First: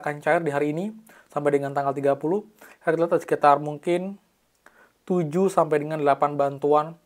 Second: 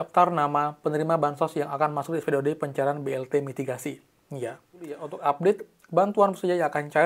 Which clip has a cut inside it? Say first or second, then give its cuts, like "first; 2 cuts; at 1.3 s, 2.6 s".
second; 1 cut; at 5.1 s